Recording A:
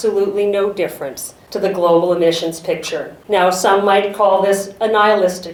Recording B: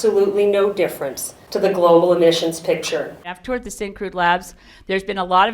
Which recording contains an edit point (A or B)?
B